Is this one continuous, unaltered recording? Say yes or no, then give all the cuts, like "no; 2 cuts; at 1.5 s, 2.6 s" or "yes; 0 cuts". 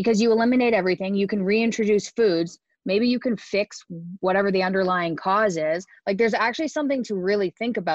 yes; 0 cuts